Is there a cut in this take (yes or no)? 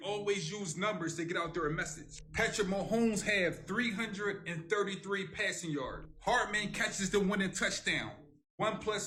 no